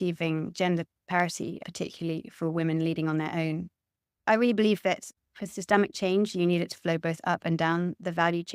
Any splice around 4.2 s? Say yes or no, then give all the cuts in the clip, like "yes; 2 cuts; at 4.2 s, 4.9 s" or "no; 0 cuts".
yes; 2 cuts; at 4.2 s, 5.1 s